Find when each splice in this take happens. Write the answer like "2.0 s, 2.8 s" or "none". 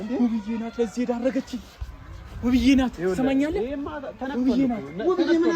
none